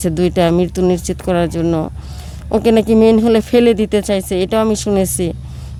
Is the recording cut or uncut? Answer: uncut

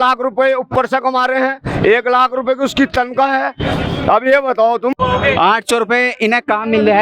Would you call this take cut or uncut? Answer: cut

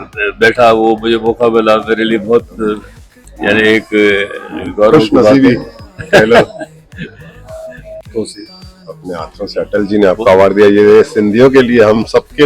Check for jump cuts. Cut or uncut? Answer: cut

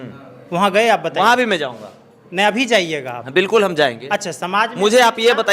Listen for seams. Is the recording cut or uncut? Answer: uncut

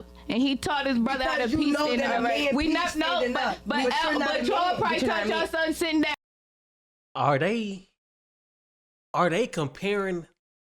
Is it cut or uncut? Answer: uncut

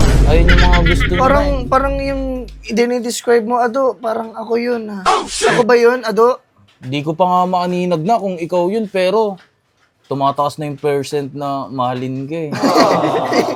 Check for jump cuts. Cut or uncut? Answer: uncut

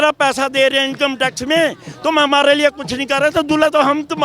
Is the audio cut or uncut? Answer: uncut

